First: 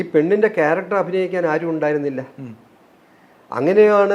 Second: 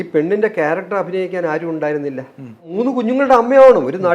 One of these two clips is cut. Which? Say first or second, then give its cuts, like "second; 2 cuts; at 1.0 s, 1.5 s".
second; 1 cut; at 2.7 s